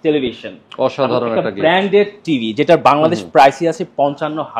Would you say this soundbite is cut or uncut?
uncut